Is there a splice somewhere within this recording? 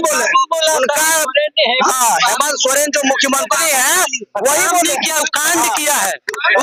no; 0 cuts

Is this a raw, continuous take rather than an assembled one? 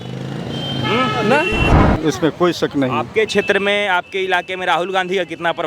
no; 1 cut; at 1.7 s

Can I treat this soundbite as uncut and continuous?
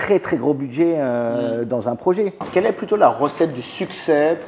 no; 1 cut; at 2.4 s

